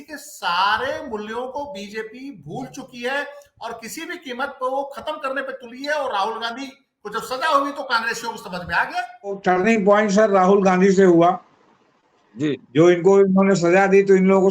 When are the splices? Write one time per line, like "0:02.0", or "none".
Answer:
0:09.2